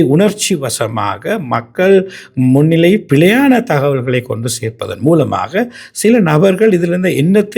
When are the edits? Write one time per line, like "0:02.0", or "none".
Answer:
none